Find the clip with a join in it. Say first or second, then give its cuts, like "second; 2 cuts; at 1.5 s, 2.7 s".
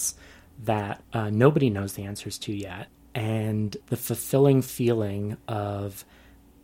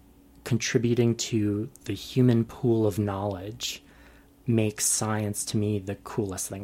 first; 3 cuts; at 1.0 s, 3.0 s, 3.8 s